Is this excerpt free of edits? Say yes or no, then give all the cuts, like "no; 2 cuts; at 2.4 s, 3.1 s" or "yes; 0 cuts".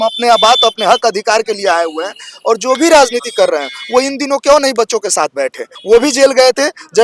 no; 1 cut; at 5.7 s